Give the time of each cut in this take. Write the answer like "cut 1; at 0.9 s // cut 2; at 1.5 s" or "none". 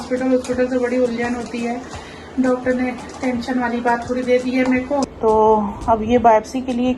cut 1; at 5.1 s